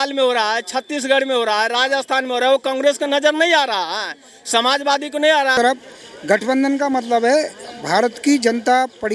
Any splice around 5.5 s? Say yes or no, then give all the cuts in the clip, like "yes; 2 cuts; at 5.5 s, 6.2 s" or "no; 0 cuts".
yes; 1 cut; at 5.5 s